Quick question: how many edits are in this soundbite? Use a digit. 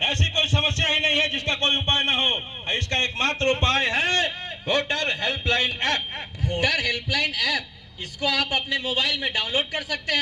1